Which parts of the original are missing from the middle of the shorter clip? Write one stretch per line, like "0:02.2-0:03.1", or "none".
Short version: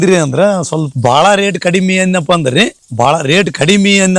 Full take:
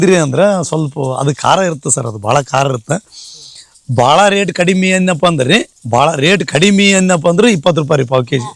0:00.9-0:03.8